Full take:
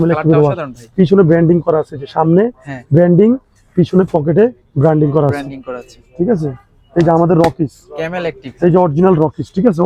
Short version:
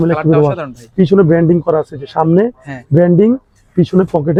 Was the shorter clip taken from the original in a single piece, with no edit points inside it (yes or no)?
yes